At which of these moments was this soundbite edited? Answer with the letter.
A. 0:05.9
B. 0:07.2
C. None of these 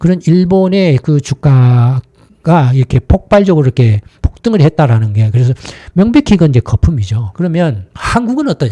B